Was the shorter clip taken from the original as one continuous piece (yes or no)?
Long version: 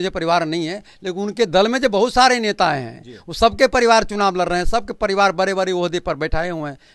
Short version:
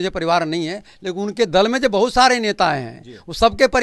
yes